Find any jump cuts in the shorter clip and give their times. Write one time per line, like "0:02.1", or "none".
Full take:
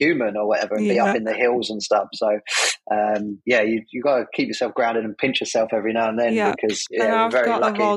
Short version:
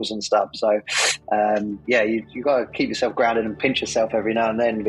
none

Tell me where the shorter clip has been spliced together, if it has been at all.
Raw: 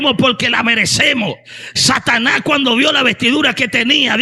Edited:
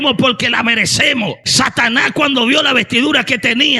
0:01.4

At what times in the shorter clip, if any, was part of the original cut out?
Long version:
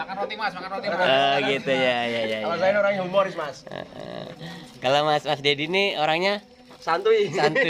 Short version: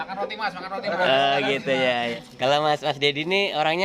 0:02.1

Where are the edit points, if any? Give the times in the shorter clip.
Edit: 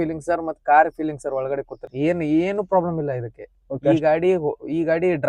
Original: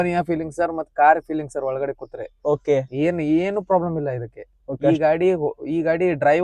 0:01.9

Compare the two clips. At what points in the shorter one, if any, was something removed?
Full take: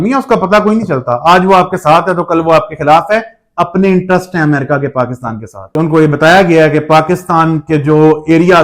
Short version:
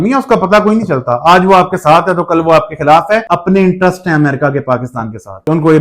0:03.2

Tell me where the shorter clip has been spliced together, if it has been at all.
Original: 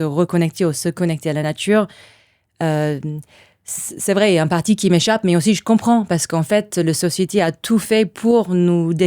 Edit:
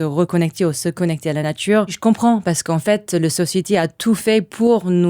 0:02.0

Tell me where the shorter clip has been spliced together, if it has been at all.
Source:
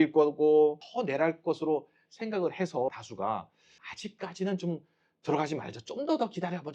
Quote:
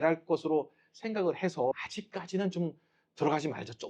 0:01.9

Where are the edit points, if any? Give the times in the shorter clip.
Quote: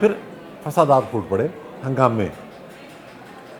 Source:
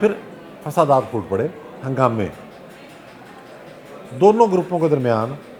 none

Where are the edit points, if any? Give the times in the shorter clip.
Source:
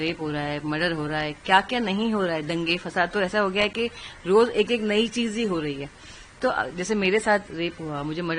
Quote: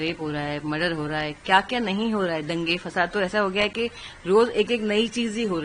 none

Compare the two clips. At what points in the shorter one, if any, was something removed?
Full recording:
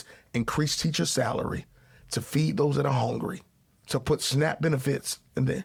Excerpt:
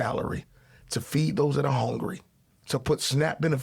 none

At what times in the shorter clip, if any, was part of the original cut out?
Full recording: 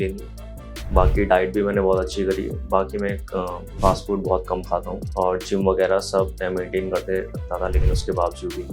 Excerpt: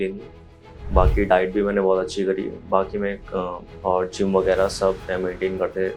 0:03.7

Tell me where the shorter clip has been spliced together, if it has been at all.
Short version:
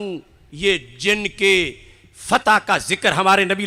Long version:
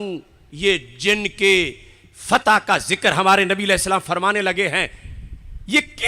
none

